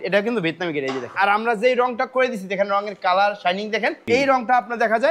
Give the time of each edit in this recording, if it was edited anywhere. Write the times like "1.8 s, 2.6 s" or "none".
1.1 s, 4.0 s